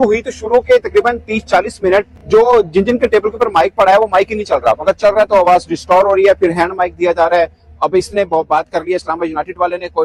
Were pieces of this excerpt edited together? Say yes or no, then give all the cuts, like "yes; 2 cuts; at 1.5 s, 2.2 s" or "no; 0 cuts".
no; 0 cuts